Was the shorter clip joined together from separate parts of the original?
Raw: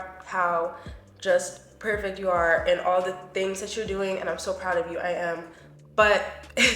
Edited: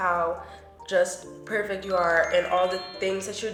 no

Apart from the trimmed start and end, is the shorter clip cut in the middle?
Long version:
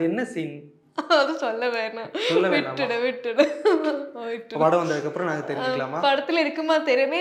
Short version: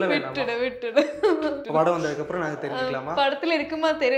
yes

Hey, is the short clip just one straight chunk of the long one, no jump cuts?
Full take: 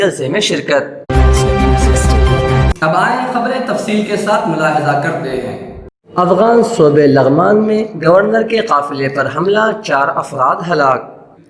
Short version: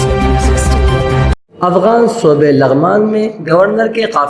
no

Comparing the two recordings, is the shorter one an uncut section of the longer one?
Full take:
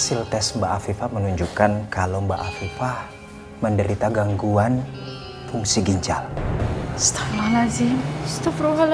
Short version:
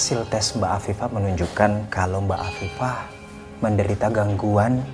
yes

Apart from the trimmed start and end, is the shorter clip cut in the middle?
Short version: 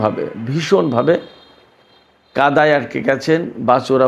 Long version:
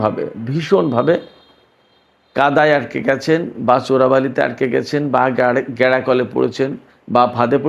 no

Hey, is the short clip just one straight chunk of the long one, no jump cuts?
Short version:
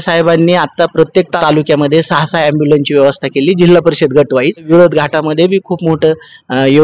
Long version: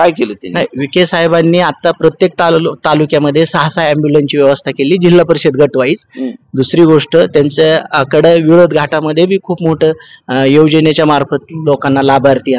no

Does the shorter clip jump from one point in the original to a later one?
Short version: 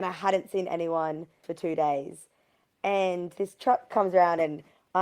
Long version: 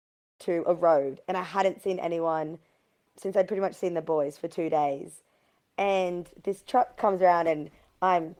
yes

